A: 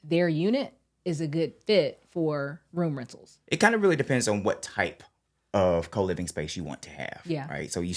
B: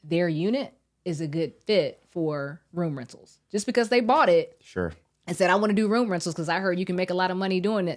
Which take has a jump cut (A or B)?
A